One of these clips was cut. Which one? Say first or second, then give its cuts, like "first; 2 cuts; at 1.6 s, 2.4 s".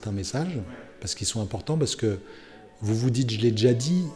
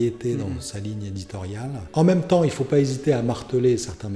second; 1 cut; at 1.9 s